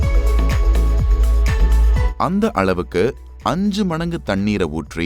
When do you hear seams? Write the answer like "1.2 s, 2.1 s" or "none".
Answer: 2.1 s